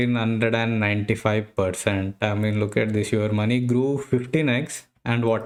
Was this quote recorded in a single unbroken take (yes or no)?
yes